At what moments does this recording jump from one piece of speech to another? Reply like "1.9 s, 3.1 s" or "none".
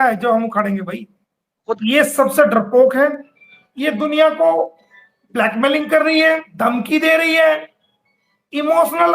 1.7 s, 6.5 s